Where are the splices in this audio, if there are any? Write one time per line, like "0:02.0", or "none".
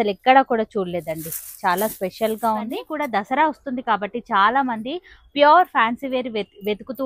0:02.8